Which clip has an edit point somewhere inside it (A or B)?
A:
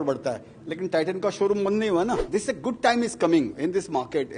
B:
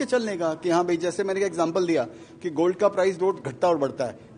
A